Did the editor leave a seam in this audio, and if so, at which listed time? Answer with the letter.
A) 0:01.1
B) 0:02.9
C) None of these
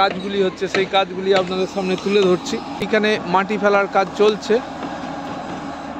B